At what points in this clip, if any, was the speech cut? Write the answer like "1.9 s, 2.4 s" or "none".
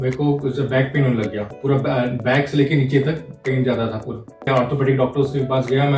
1.5 s, 4.4 s